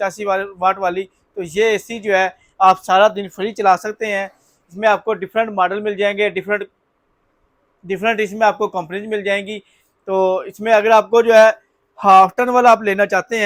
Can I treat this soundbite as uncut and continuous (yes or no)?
yes